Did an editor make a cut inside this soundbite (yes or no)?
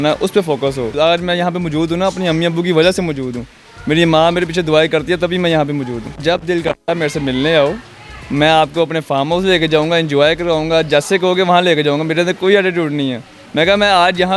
yes